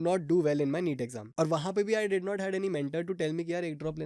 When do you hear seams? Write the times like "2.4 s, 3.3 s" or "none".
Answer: 1.2 s